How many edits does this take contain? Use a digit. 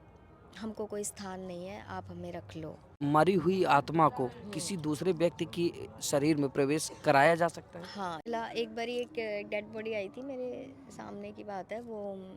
2